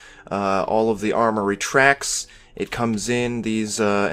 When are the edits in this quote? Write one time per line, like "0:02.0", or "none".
none